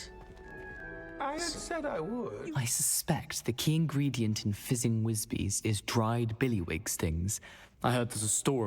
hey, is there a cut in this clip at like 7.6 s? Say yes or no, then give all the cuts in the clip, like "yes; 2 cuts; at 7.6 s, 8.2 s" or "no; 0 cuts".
no; 1 cut; at 2.5 s